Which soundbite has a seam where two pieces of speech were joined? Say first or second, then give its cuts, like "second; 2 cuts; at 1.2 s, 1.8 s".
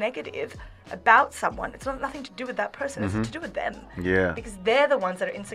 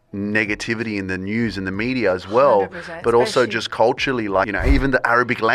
second; 1 cut; at 4.5 s